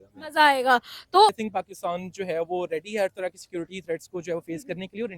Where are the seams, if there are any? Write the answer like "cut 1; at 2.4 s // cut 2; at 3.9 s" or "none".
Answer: cut 1; at 1.4 s